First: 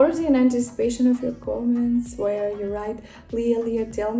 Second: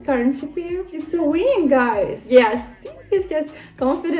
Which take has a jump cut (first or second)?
second